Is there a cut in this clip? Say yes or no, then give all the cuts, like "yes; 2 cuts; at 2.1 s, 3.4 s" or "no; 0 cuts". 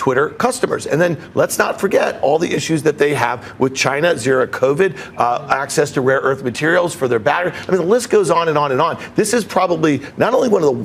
no; 0 cuts